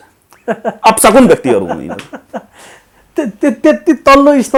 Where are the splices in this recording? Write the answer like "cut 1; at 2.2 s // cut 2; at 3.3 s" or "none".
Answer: none